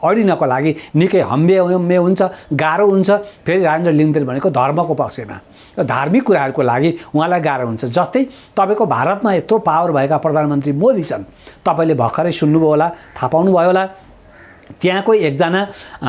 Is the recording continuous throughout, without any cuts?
yes; 0 cuts

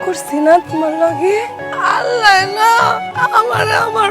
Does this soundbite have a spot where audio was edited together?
yes; 2 cuts; at 1.6 s, 3.1 s

